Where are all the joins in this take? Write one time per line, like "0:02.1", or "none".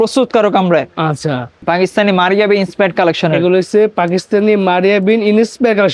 0:01.6